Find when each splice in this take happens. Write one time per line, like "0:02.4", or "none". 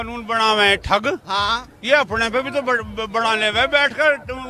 none